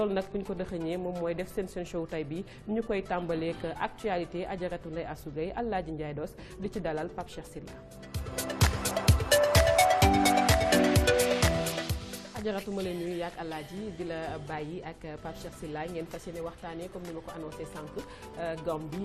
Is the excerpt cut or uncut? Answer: uncut